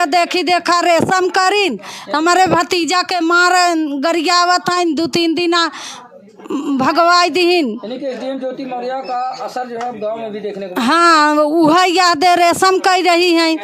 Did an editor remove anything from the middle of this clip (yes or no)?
no